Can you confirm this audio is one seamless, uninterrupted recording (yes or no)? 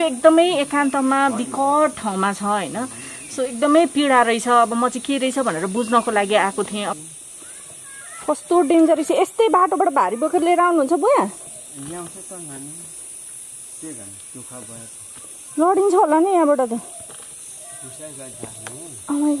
no